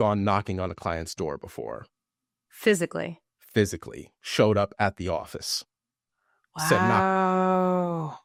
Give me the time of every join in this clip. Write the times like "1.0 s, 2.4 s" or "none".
none